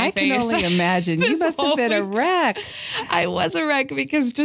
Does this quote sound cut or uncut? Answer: uncut